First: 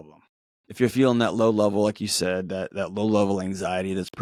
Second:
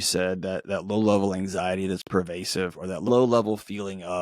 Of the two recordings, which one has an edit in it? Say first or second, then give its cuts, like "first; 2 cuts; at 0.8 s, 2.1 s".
second; 1 cut; at 3.1 s